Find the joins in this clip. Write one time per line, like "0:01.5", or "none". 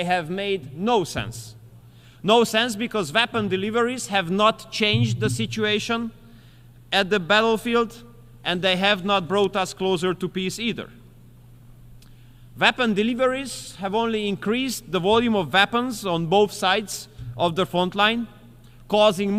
none